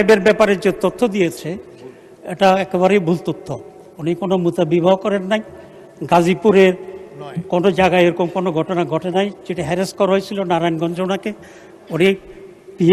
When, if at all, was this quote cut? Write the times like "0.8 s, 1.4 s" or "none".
none